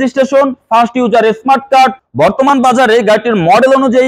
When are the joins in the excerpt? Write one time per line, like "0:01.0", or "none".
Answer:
0:02.0